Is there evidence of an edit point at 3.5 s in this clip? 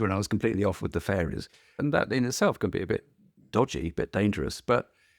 no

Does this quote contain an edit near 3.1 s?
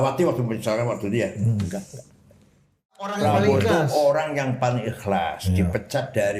yes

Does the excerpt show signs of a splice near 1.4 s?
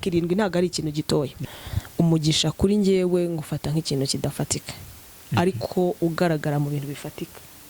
yes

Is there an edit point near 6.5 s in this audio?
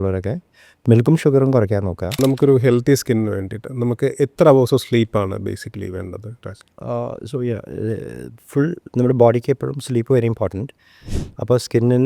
no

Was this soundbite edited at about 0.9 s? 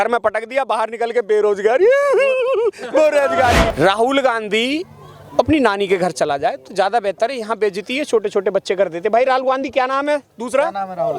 no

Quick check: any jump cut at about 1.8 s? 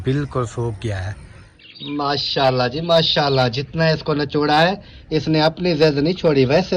yes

